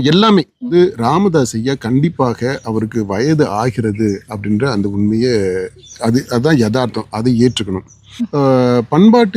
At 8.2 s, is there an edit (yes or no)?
yes